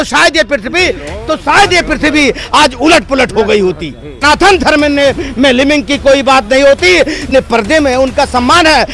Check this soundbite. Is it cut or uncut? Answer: cut